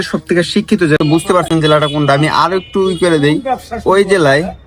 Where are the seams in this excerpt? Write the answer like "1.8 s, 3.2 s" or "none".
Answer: 1.0 s